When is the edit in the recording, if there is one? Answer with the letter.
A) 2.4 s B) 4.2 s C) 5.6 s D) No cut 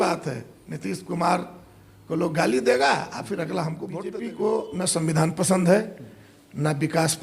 B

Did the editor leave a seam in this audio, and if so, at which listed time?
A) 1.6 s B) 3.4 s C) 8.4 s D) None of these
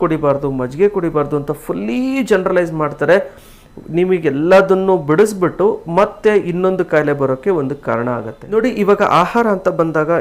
C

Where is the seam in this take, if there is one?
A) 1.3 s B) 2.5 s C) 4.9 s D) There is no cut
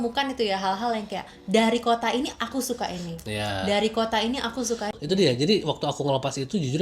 C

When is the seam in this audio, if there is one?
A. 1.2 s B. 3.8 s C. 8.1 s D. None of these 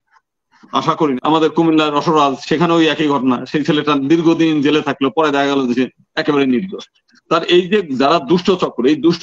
A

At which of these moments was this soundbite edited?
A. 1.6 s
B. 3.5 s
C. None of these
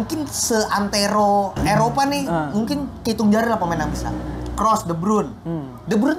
A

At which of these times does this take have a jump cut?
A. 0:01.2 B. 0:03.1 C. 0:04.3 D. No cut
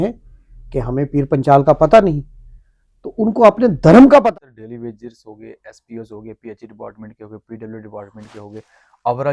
C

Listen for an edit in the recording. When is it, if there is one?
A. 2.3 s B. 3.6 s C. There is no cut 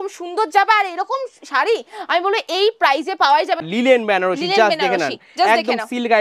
B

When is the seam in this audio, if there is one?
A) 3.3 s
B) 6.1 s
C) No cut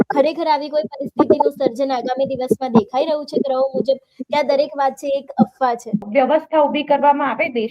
B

